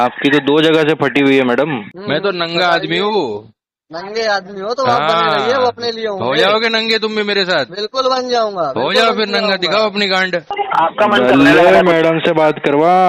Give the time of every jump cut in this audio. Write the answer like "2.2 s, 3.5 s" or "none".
1.9 s, 10.5 s